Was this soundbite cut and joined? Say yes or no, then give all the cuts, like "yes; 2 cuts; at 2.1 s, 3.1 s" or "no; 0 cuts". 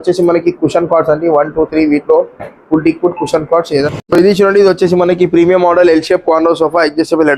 yes; 1 cut; at 3.8 s